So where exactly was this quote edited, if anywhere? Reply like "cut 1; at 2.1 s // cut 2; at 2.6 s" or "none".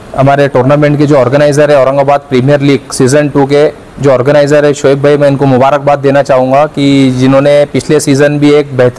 none